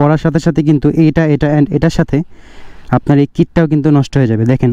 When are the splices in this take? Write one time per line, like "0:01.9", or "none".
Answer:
none